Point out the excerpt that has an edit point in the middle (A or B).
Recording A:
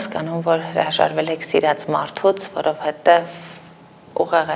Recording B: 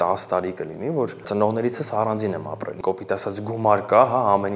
B